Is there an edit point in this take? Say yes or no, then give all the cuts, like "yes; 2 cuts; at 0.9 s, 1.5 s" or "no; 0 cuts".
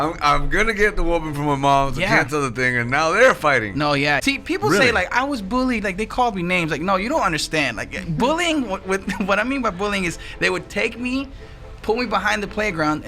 yes; 1 cut; at 4.2 s